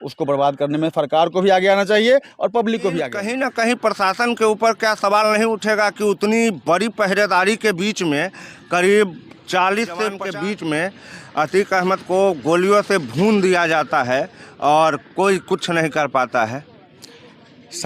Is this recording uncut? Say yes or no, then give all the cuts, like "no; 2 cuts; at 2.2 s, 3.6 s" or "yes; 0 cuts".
no; 2 cuts; at 3.2 s, 10.2 s